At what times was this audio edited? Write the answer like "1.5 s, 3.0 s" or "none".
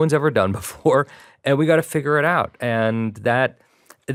none